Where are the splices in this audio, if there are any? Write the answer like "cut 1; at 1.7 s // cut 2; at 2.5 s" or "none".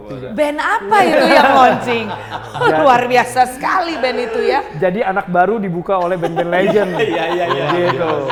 none